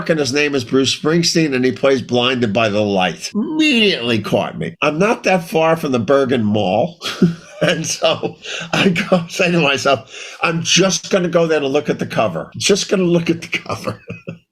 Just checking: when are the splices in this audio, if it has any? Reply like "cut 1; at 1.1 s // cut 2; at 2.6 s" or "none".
cut 1; at 3.2 s // cut 2; at 4.6 s // cut 3; at 7.0 s // cut 4; at 12.5 s